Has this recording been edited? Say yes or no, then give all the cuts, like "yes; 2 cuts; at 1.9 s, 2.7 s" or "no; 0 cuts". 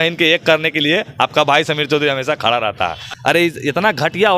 yes; 1 cut; at 3.2 s